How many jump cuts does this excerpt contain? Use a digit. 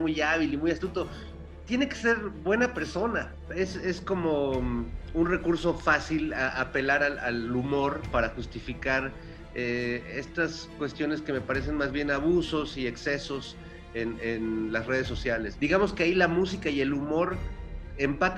2